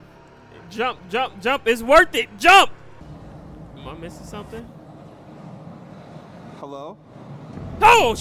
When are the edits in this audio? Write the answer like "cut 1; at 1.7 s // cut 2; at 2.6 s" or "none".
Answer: cut 1; at 3.0 s